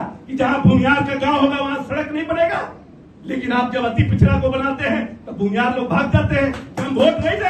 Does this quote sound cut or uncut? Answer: uncut